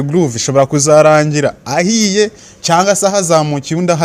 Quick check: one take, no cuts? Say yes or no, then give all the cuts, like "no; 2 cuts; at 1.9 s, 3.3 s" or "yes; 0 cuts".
yes; 0 cuts